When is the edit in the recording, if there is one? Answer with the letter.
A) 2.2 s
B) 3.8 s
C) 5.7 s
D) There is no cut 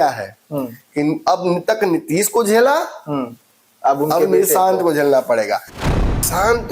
C